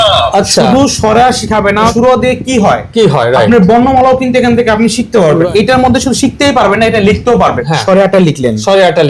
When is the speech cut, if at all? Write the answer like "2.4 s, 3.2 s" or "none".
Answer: 1.9 s, 5.5 s, 7.7 s